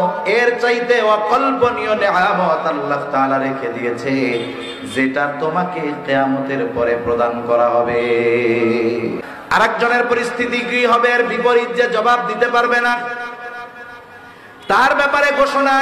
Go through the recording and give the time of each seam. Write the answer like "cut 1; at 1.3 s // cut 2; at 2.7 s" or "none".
cut 1; at 9.3 s